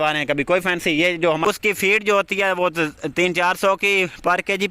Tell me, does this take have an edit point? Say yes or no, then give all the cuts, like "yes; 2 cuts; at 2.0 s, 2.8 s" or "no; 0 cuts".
yes; 1 cut; at 1.5 s